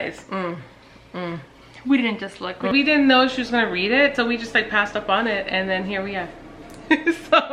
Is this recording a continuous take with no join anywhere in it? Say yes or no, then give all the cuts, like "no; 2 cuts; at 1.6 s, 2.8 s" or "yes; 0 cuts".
no; 1 cut; at 2.7 s